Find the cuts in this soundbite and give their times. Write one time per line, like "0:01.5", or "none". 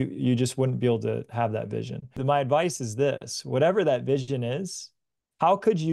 0:02.1